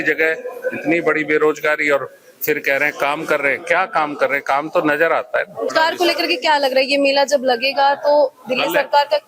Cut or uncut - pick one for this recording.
uncut